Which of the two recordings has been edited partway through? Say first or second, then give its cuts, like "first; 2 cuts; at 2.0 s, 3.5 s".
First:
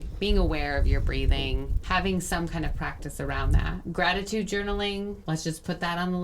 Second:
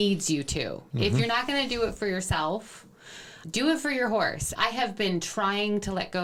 first; 3 cuts; at 1.8 s, 3.9 s, 5.2 s